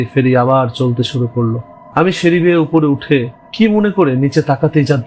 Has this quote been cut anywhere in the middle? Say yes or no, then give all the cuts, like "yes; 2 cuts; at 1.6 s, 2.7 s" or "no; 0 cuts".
yes; 1 cut; at 1.9 s